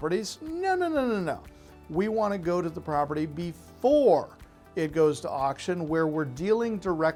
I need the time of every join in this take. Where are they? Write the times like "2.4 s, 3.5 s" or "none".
none